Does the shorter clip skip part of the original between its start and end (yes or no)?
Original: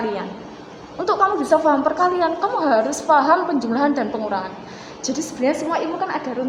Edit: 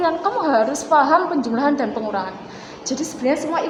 no